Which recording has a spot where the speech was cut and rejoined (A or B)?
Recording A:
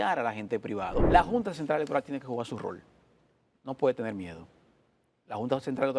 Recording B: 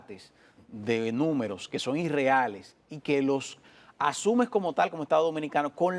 A